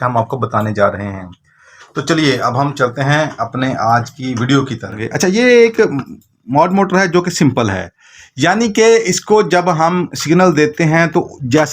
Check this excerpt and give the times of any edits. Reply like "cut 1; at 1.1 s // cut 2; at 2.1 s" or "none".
cut 1; at 5.1 s